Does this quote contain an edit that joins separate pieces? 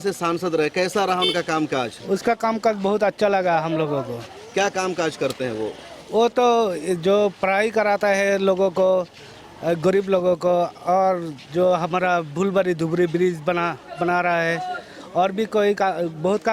no; 0 cuts

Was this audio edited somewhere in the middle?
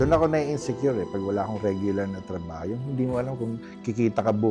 no; 0 cuts

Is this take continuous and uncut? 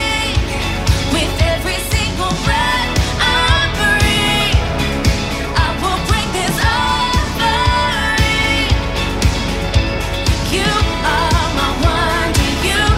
yes; 0 cuts

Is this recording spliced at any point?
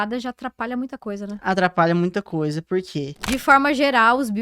yes; 1 cut; at 3.2 s

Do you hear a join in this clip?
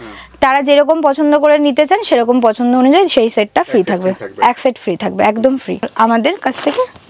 yes; 1 cut; at 5.9 s

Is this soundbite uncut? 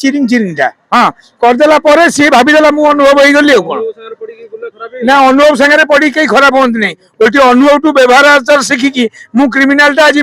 yes; 0 cuts

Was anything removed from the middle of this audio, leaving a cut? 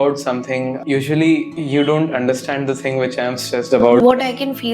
yes; 3 cuts; at 0.8 s, 1.5 s, 4.0 s

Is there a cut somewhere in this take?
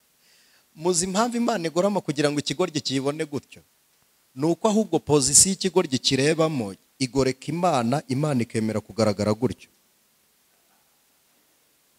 no; 0 cuts

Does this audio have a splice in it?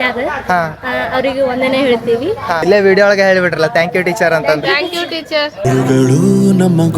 yes; 2 cuts; at 2.6 s, 5.6 s

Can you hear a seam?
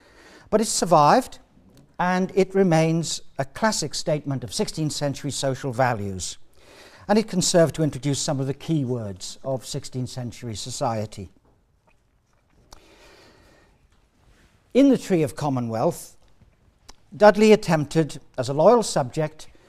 yes; 1 cut; at 7.9 s

